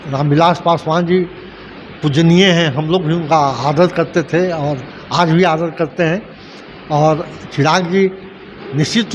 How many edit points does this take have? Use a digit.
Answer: 0